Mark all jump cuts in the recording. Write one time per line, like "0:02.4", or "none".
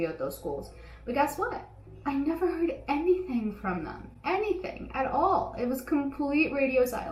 none